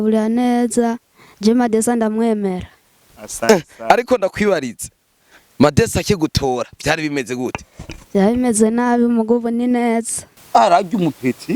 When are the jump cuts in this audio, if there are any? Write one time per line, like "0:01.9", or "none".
0:10.2